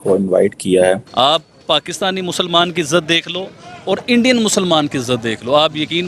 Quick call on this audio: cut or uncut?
cut